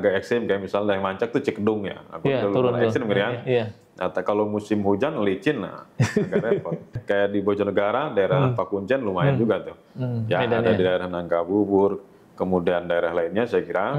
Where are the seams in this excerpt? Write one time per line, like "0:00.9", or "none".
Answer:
0:07.0